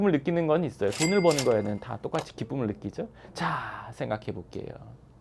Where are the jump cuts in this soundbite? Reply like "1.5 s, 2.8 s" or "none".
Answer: none